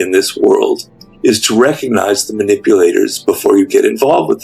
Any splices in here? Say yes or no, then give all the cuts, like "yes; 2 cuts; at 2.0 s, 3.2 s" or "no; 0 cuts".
no; 0 cuts